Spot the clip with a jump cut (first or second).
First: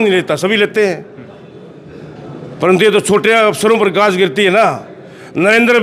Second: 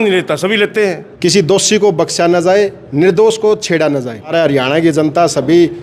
second